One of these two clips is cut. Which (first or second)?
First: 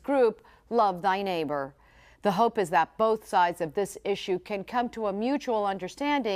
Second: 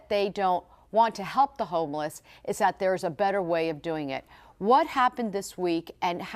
second